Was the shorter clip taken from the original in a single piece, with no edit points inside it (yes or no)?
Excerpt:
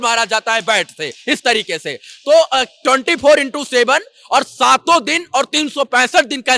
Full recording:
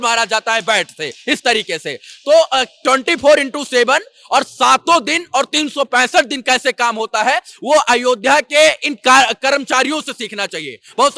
yes